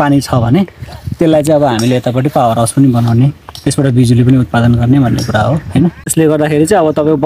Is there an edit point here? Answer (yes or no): yes